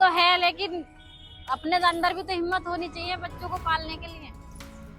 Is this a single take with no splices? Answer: yes; 0 cuts

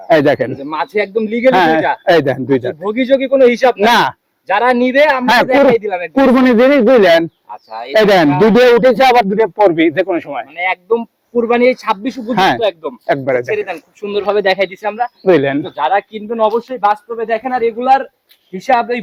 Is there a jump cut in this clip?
no; 0 cuts

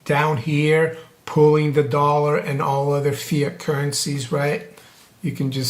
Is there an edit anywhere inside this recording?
no; 0 cuts

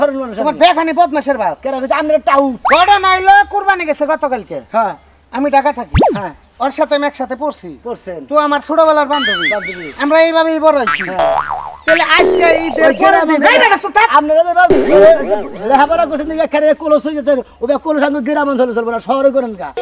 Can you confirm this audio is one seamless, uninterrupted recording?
yes; 0 cuts

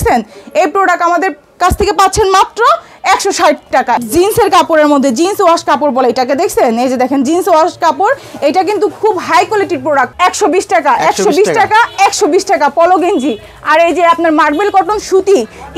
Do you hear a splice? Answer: yes; 2 cuts; at 4.0 s, 10.1 s

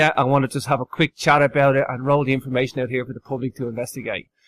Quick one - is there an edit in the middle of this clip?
yes; 1 cut; at 2.7 s

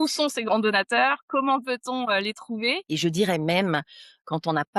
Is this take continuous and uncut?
no; 1 cut; at 2.8 s

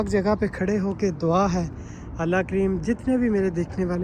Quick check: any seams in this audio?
no; 0 cuts

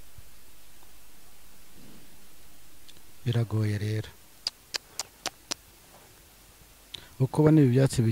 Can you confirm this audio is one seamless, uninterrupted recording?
yes; 0 cuts

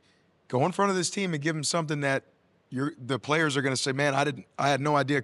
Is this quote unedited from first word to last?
yes; 0 cuts

